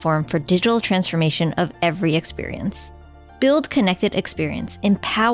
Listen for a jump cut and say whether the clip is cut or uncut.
uncut